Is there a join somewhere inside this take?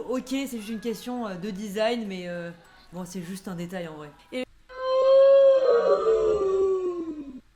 no; 0 cuts

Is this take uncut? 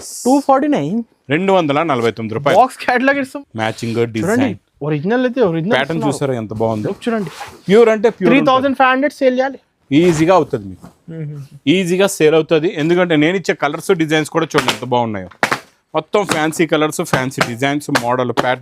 no; 1 cut; at 3.3 s

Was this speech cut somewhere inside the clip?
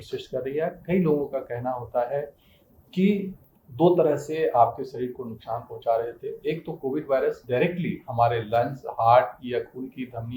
yes; 1 cut; at 3.4 s

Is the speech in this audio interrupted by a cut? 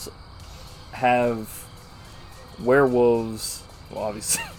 no; 0 cuts

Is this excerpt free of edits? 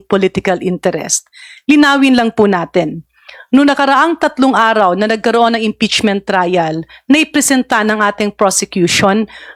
yes; 0 cuts

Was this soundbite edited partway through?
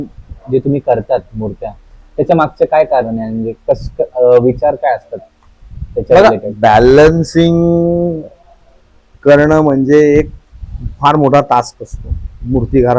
no; 0 cuts

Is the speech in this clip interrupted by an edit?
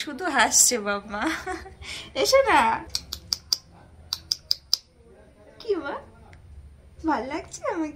no; 0 cuts

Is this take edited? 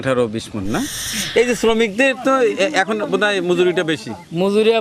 yes; 1 cut; at 1.1 s

